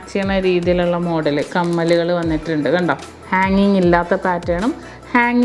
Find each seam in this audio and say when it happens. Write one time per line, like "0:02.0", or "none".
0:03.2